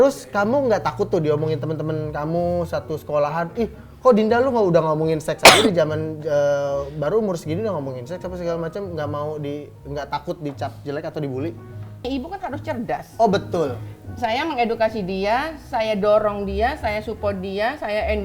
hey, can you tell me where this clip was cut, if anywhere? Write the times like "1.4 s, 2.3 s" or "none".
12.0 s